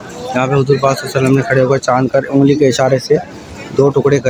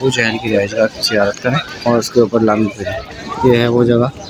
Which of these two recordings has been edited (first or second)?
second